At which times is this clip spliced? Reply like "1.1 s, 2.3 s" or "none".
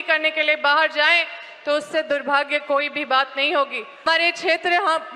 4.0 s